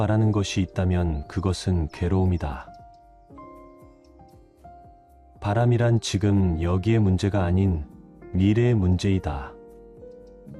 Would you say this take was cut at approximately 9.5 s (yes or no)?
yes